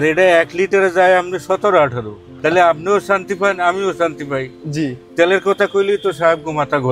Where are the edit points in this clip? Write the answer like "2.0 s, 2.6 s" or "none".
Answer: 2.4 s